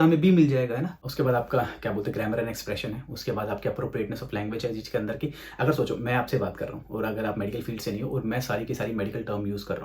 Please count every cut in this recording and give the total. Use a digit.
1